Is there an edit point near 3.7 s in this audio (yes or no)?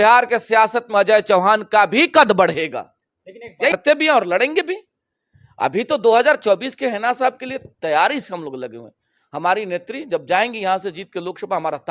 yes